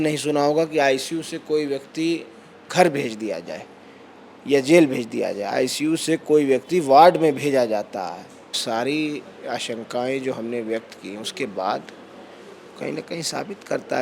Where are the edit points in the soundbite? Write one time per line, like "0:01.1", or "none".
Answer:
0:08.5